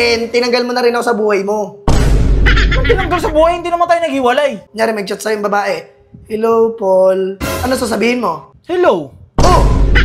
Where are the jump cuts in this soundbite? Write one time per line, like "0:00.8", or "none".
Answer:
0:04.6
0:08.5